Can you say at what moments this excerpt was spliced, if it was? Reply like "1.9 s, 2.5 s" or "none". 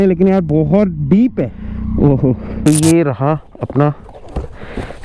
1.6 s, 2.7 s